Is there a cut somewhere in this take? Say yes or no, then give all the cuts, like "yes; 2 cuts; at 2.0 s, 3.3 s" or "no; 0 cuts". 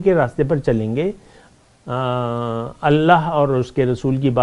no; 0 cuts